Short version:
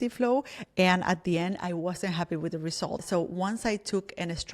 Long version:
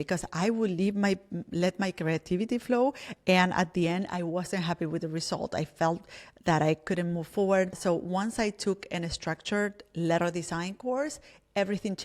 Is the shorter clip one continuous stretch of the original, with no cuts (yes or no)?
no